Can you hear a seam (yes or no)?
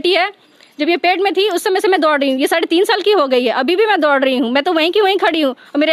no